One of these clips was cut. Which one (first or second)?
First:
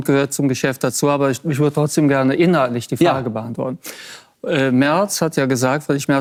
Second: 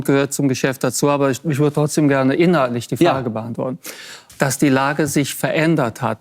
second